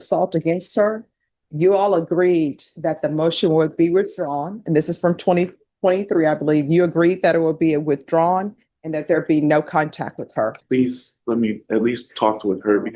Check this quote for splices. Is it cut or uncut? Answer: cut